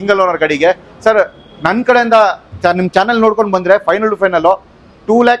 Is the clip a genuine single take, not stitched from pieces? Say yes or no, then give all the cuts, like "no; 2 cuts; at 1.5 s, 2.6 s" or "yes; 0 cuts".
yes; 0 cuts